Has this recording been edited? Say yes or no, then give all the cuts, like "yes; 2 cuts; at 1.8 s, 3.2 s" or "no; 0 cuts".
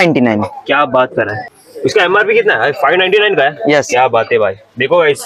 no; 0 cuts